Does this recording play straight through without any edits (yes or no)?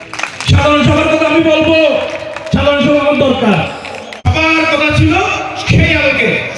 no